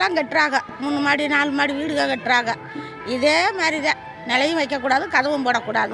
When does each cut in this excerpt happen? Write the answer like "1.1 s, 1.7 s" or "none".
none